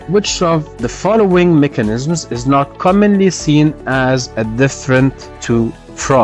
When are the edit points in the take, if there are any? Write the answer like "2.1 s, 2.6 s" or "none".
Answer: 5.3 s

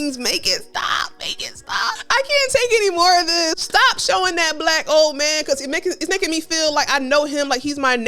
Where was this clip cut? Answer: 2.0 s, 3.6 s

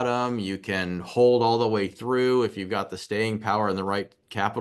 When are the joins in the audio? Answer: none

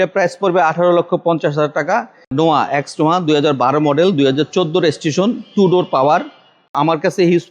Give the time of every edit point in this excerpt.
2.2 s, 6.7 s

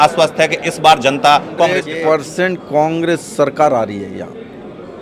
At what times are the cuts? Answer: 1.9 s

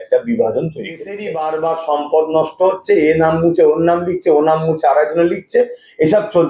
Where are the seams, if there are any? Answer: 1.3 s

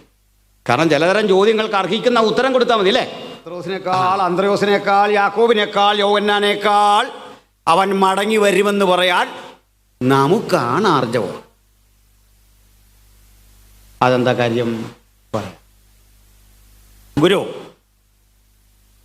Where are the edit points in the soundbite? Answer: 3.7 s

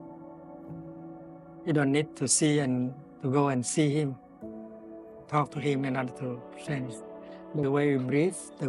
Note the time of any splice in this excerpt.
0.9 s

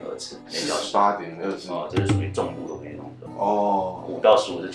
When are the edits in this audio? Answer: none

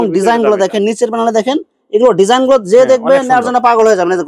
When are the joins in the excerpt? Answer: none

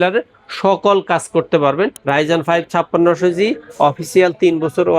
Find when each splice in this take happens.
2.0 s

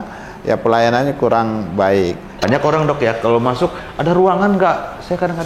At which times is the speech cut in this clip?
2.3 s

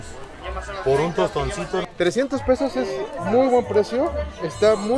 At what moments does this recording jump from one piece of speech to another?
1.9 s

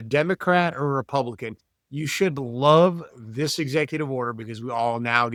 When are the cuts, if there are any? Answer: none

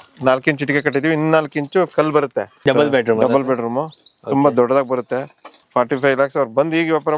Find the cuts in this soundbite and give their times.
2.5 s, 5.5 s

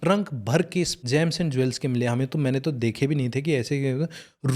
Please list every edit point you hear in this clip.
1.0 s

